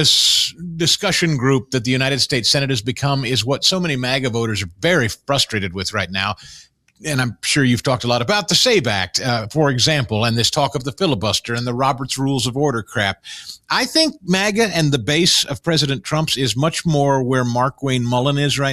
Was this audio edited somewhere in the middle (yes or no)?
no